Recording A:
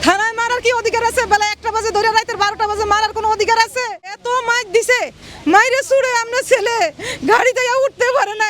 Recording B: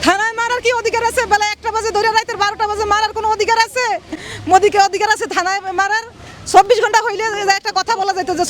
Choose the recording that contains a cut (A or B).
A